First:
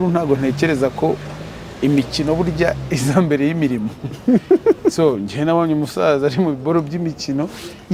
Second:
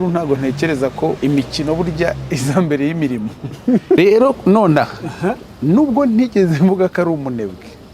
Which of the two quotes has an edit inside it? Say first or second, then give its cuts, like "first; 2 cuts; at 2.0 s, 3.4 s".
second; 2 cuts; at 1.2 s, 4.0 s